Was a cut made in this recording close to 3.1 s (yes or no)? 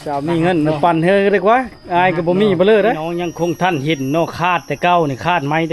yes